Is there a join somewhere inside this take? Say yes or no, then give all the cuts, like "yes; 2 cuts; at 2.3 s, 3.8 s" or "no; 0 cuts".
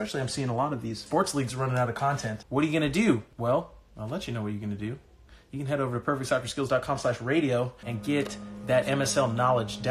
yes; 4 cuts; at 1.0 s, 2.3 s, 3.3 s, 7.9 s